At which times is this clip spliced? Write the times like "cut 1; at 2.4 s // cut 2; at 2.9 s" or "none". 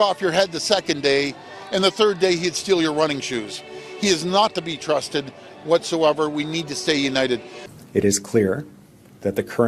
cut 1; at 7.5 s